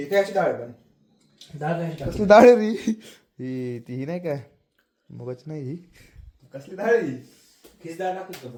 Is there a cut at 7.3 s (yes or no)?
no